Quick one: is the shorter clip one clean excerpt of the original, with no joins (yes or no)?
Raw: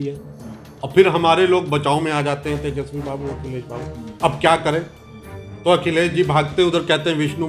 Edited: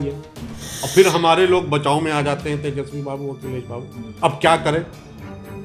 yes